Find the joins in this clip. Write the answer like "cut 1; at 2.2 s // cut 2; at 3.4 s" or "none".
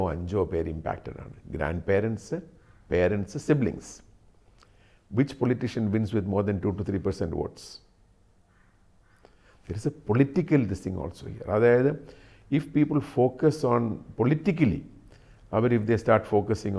none